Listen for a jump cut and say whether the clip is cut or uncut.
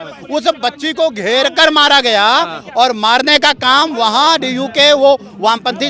uncut